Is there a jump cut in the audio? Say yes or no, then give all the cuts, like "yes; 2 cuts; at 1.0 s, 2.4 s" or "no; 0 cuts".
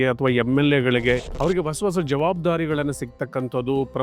yes; 1 cut; at 1.3 s